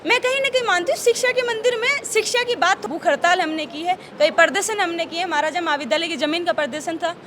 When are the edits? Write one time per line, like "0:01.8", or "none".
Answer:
0:02.8